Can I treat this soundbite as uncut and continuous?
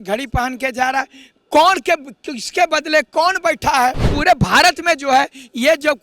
no; 1 cut; at 4.1 s

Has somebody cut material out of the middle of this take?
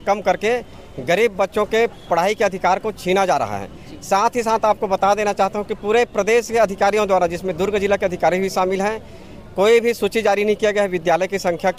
no; 0 cuts

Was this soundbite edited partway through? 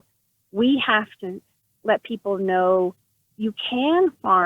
yes; 1 cut; at 1.2 s

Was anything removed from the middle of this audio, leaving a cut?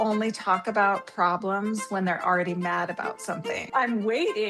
yes; 1 cut; at 3.6 s

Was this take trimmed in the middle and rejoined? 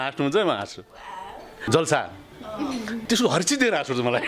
yes; 2 cuts; at 1.4 s, 3.0 s

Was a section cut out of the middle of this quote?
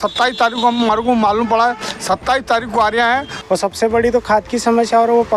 yes; 1 cut; at 3.3 s

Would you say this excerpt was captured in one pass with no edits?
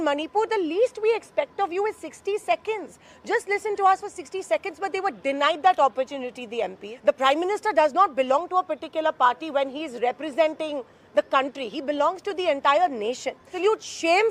no; 2 cuts; at 6.8 s, 13.5 s

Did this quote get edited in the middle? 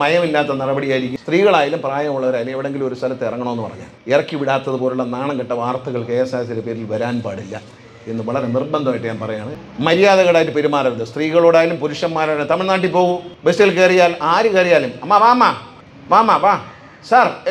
yes; 2 cuts; at 1.2 s, 9.5 s

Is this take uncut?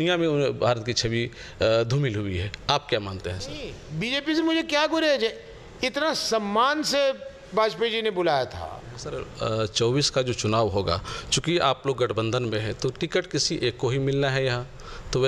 no; 2 cuts; at 3.8 s, 9.3 s

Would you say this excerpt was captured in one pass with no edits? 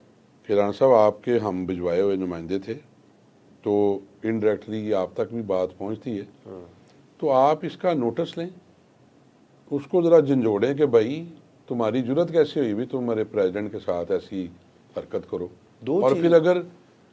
yes; 0 cuts

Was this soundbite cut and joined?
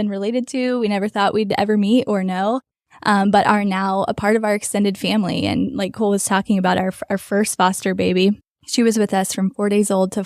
yes; 1 cut; at 8.5 s

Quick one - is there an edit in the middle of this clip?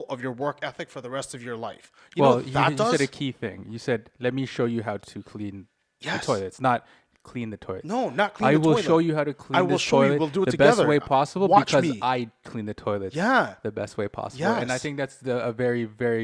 no; 0 cuts

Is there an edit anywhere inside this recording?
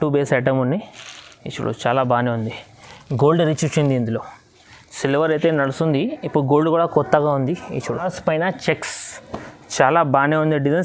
yes; 1 cut; at 8.0 s

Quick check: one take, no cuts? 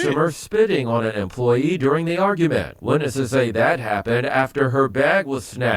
no; 2 cuts; at 1.6 s, 3.5 s

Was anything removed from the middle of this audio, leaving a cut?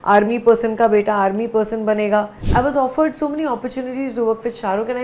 yes; 1 cut; at 2.4 s

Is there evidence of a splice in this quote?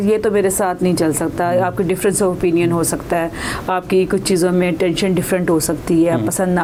no; 0 cuts

